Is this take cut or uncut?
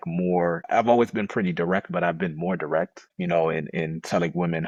uncut